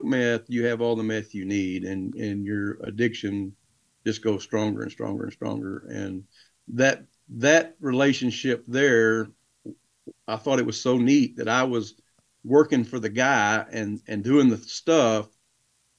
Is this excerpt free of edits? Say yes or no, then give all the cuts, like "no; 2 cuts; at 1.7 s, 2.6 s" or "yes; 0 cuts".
yes; 0 cuts